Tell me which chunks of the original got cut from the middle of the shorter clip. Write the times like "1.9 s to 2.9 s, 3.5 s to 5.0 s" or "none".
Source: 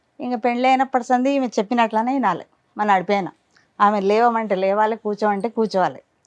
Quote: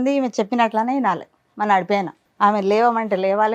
3.4 s to 3.6 s